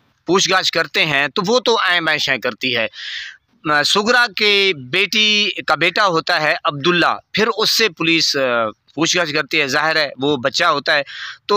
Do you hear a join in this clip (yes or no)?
no